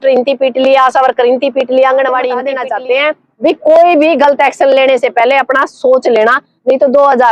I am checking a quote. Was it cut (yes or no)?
yes